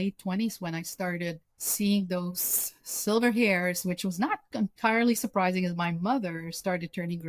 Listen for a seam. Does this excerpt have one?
no; 0 cuts

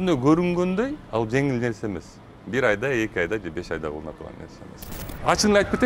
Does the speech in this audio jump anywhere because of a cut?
yes; 1 cut; at 4.9 s

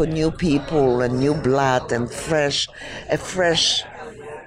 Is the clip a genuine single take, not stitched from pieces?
yes; 0 cuts

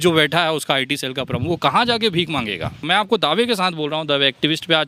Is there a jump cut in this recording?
yes; 1 cut; at 2.8 s

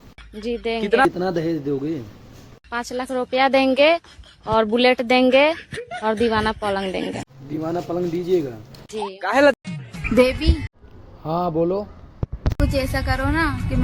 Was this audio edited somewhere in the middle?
yes; 1 cut; at 9.7 s

